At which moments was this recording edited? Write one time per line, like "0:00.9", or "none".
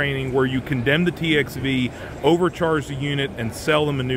none

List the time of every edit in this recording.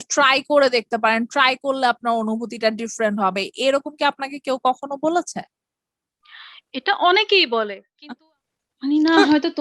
0:07.8

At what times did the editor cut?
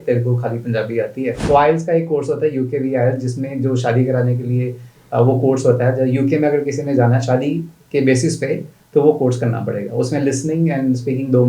0:01.4

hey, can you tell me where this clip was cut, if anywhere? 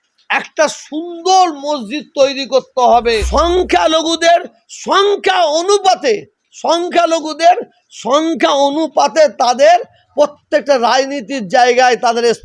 0:03.2

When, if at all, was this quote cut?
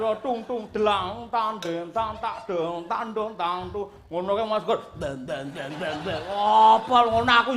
none

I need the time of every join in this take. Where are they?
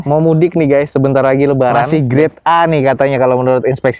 0:01.8

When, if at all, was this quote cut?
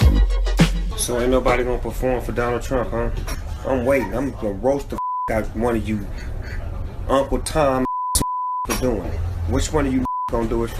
0:00.9

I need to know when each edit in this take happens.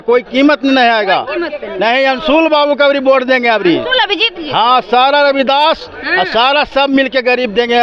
none

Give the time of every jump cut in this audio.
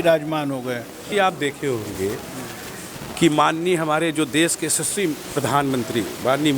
0:01.1

